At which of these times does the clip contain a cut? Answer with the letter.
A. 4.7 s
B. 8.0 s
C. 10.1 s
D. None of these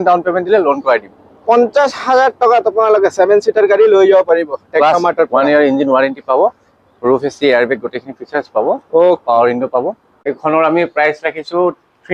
C